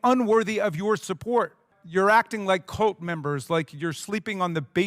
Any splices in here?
yes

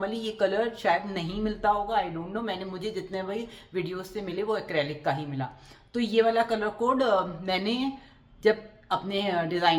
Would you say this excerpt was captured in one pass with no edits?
yes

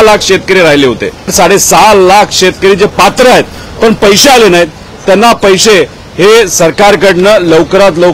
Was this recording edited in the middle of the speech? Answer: yes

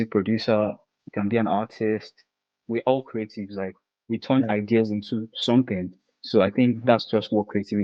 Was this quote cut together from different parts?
no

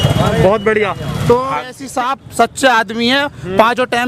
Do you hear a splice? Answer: yes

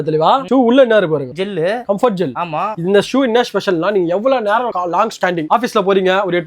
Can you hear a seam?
no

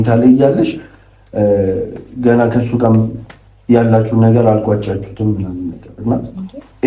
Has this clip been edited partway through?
no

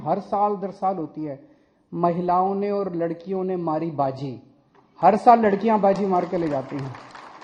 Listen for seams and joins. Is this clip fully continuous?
yes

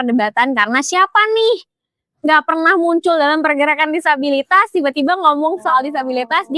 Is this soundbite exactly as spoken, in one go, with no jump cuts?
yes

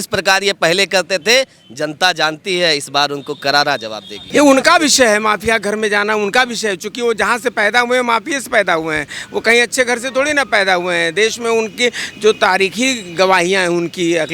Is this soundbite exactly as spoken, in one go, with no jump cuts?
no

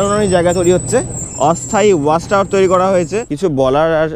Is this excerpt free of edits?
no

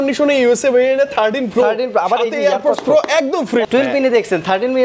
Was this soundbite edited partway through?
yes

